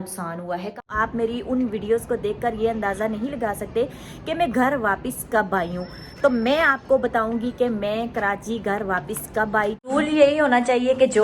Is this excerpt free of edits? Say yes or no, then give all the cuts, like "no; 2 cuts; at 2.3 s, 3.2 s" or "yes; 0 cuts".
no; 2 cuts; at 0.8 s, 9.8 s